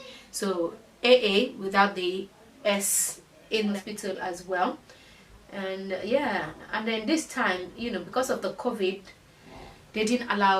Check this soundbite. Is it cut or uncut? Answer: cut